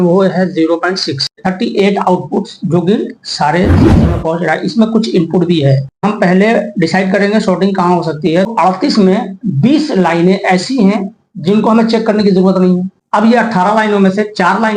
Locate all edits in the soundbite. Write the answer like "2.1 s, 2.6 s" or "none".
1.4 s, 6.0 s, 8.5 s, 13.0 s